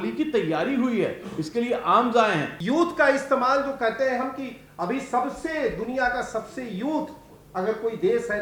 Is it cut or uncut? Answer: cut